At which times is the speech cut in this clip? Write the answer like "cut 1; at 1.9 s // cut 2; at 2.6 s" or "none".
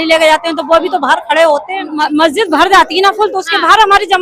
cut 1; at 1.9 s